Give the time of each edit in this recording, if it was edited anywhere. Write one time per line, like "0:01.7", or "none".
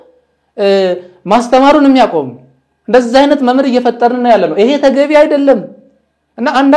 none